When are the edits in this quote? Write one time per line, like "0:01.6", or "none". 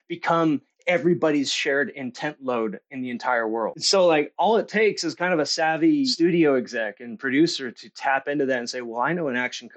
0:03.8
0:06.1